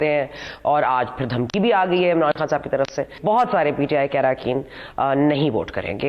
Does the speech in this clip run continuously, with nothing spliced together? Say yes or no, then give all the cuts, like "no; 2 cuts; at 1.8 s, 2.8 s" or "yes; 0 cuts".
no; 1 cut; at 3.1 s